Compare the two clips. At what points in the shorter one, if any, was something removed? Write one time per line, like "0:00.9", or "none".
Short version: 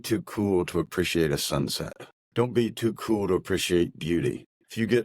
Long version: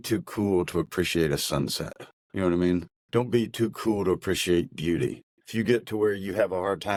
0:02.2